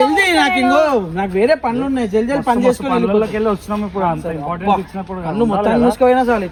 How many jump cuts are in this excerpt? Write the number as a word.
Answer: zero